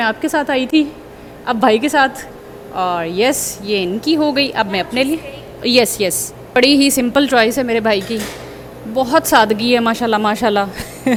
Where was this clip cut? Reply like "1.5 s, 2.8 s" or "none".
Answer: none

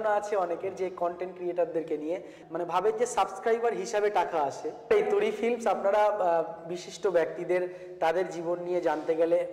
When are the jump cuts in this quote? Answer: 2.3 s, 4.9 s

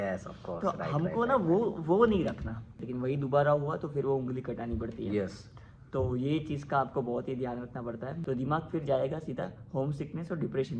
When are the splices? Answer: 2.8 s, 8.1 s

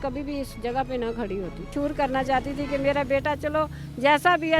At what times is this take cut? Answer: 1.7 s

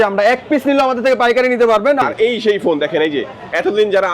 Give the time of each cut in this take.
2.0 s

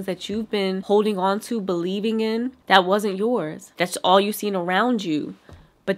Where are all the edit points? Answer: 2.6 s, 3.7 s

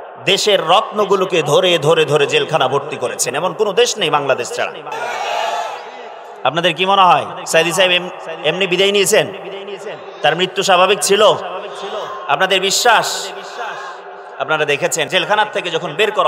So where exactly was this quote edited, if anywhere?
4.9 s, 15.1 s

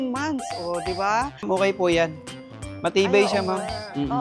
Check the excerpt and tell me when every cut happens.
1.4 s

